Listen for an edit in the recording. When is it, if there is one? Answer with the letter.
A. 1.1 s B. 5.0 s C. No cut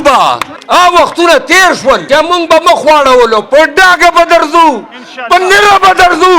C